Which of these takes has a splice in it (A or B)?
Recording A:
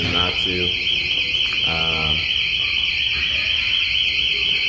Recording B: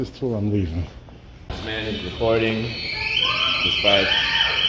B